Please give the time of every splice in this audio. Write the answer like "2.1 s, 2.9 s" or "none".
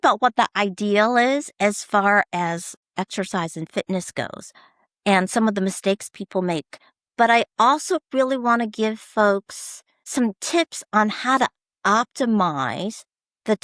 2.8 s, 10.0 s